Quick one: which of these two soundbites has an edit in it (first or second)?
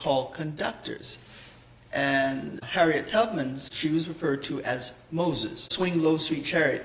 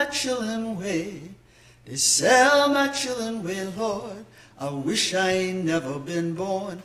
first